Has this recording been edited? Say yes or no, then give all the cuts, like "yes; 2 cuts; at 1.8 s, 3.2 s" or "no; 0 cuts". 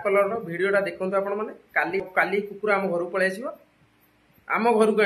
yes; 1 cut; at 2.0 s